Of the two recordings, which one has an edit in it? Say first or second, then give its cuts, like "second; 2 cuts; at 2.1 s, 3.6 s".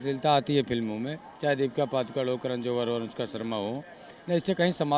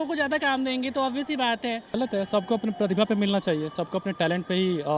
second; 1 cut; at 1.9 s